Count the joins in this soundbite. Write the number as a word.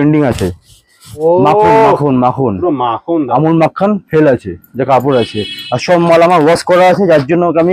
one